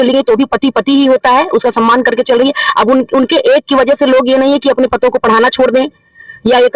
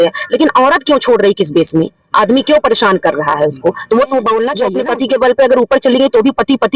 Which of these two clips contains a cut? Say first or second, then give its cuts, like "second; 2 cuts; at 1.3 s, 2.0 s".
second; 1 cut; at 4.7 s